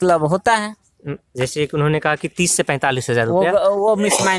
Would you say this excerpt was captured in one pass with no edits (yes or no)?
yes